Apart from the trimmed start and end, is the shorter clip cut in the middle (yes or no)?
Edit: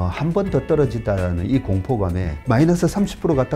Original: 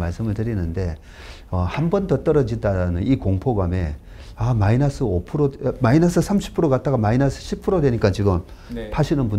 yes